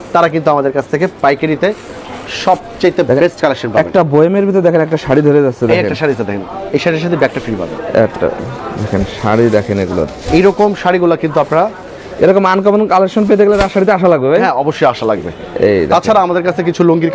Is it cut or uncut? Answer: uncut